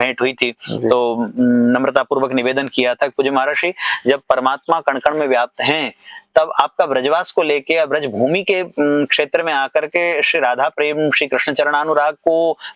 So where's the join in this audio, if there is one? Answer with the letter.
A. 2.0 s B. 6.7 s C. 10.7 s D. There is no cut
D